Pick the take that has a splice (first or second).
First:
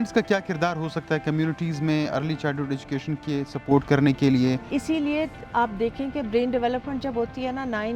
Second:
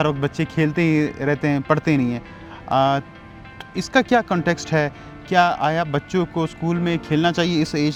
first